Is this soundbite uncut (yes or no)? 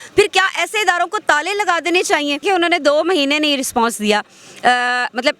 no